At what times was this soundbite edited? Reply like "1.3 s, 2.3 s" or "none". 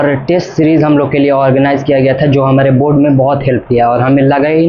none